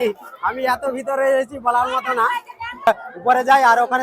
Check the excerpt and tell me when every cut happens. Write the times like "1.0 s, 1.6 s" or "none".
2.9 s